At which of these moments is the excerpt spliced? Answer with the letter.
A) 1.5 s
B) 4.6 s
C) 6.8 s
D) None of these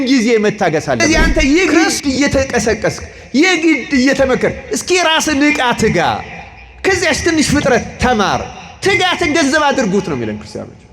A